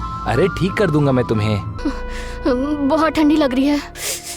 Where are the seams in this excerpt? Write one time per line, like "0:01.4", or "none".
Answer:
0:01.7